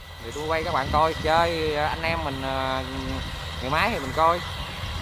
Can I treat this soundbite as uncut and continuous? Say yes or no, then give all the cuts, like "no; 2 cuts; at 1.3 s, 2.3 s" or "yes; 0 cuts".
yes; 0 cuts